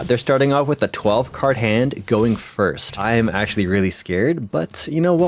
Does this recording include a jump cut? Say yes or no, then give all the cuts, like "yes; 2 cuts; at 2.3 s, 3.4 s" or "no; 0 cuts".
yes; 1 cut; at 2.9 s